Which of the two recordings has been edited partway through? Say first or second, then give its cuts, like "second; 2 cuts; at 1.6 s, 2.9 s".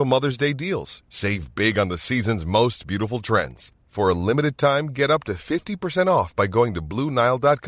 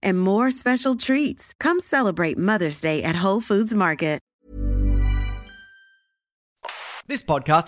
second; 2 cuts; at 4.3 s, 6.5 s